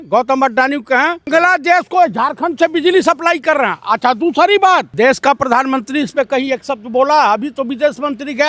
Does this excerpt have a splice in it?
yes; 2 cuts; at 1.3 s, 4.9 s

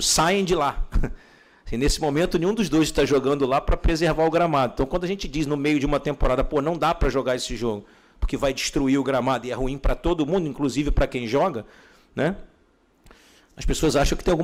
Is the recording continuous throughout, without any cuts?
yes; 0 cuts

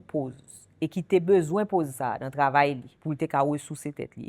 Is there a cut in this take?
yes; 1 cut; at 2.9 s

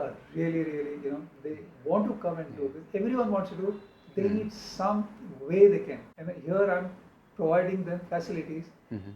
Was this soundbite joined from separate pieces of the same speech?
no; 0 cuts

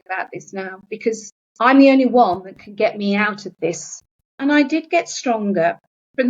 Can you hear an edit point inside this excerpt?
yes; 1 cut; at 1.4 s

